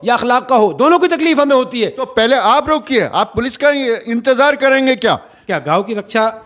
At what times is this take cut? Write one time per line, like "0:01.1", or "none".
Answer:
0:02.0
0:05.3